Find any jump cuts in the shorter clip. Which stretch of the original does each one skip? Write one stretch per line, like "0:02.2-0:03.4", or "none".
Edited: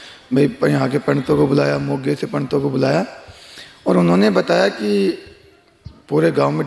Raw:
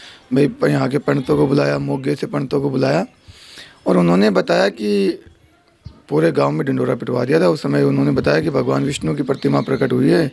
none